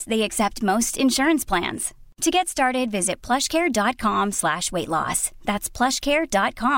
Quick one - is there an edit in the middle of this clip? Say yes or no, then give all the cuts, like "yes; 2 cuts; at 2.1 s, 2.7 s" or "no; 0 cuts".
no; 0 cuts